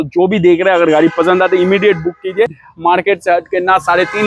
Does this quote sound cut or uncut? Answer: cut